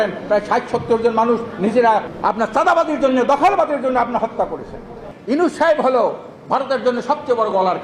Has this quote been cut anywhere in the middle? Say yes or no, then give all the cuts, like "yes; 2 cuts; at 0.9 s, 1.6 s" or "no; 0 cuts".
yes; 2 cuts; at 2.1 s, 5.1 s